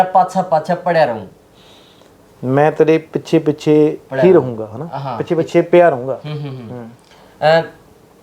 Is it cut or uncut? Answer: uncut